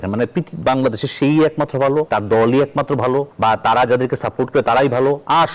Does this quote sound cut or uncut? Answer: cut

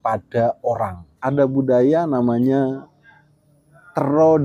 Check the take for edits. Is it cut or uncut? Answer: cut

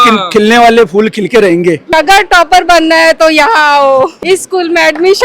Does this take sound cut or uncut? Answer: cut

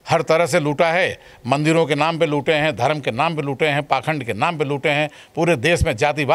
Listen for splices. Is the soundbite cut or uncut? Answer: uncut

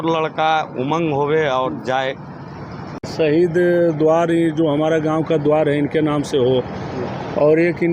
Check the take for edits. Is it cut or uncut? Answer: cut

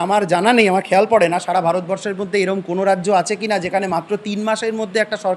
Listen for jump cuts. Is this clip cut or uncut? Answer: uncut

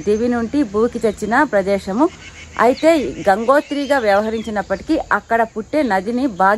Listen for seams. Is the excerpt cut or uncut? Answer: uncut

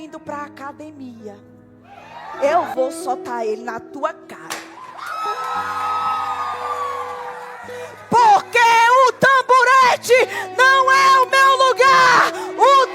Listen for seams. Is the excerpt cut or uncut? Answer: cut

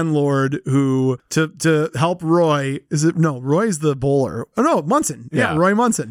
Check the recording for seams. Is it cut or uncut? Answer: uncut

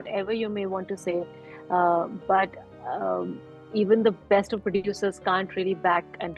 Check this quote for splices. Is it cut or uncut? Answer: uncut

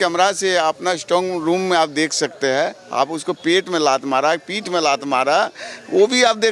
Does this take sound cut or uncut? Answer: uncut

